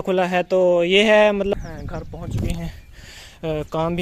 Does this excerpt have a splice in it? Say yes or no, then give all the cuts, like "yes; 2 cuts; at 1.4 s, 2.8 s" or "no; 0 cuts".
yes; 1 cut; at 1.5 s